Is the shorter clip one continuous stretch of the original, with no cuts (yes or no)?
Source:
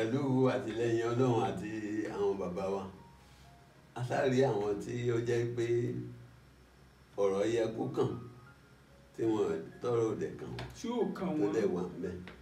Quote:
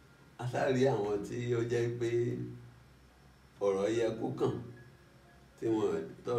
yes